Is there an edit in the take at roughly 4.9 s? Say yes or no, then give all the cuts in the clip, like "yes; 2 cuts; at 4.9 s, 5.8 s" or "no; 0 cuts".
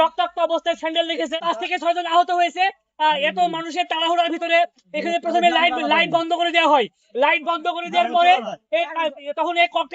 no; 1 cut; at 1.3 s